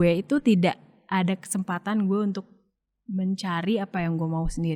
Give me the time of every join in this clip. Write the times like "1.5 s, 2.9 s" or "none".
none